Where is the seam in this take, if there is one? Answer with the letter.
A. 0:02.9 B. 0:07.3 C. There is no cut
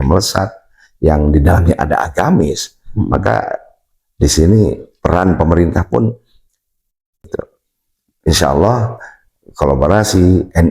B